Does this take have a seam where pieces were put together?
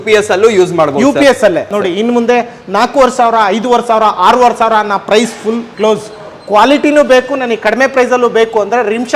yes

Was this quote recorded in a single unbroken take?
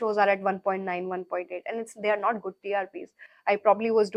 yes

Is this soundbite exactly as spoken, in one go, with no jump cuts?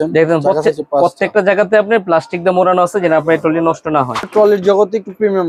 no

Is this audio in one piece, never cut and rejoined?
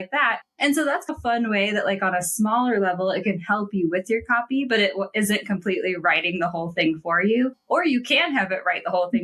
yes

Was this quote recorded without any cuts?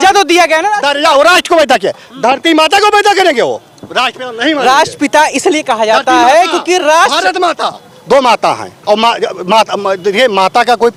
yes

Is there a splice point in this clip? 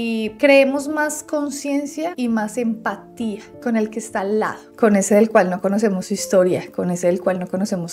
no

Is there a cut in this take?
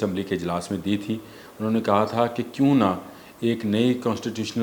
no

